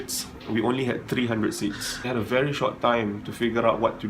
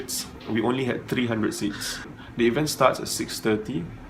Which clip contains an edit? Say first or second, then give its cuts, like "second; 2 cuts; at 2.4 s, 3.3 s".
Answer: first; 1 cut; at 2.1 s